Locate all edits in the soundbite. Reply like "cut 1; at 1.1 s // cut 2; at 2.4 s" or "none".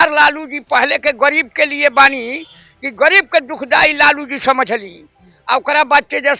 none